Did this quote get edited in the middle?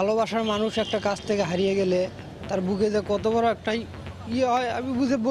no; 0 cuts

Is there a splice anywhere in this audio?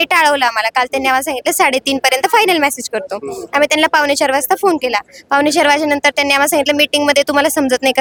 no; 0 cuts

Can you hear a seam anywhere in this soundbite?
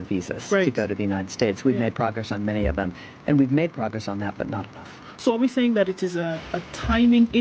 no; 0 cuts

